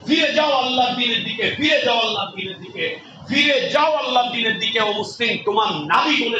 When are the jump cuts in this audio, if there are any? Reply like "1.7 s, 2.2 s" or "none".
none